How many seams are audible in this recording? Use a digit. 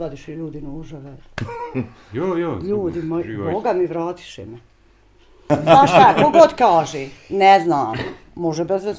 1